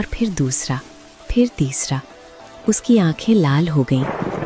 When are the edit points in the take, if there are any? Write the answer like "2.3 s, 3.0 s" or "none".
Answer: none